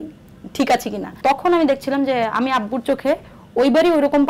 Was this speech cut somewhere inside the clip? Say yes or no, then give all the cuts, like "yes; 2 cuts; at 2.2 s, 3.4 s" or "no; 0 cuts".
yes; 1 cut; at 1.1 s